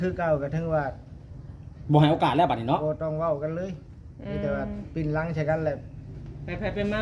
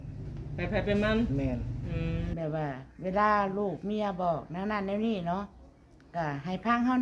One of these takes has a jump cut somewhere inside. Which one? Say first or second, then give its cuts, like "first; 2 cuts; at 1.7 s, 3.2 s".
second; 1 cut; at 2.3 s